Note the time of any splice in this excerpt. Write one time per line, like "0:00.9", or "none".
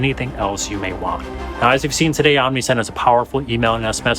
0:01.4

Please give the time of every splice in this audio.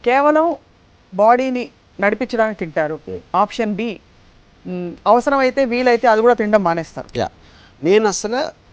none

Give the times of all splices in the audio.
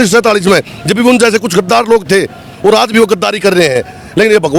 none

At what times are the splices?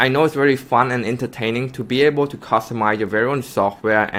none

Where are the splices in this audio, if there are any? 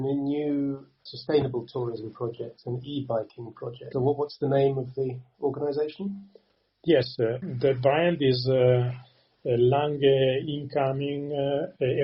0:03.8

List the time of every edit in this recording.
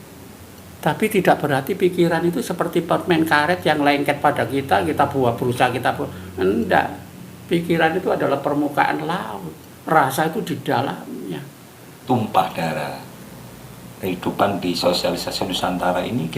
0:11.9

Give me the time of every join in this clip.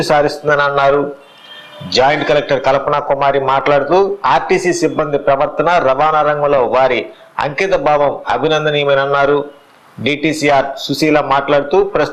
none

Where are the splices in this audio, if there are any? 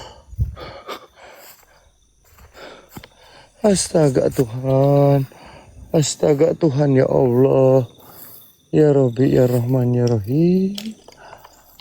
0:01.1

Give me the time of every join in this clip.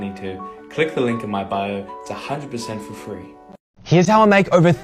0:03.7

